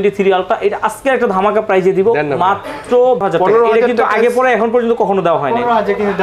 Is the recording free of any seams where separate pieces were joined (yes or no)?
no